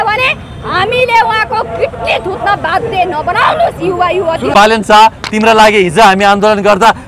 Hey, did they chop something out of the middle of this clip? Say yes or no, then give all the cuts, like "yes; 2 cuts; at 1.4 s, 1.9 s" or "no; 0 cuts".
yes; 1 cut; at 4.5 s